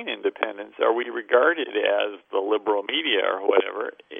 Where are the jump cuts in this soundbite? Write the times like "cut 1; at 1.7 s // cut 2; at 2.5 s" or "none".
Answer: none